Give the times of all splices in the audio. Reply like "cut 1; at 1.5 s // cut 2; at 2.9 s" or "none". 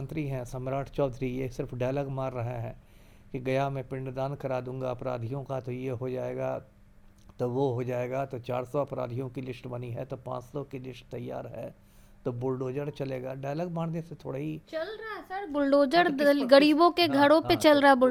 none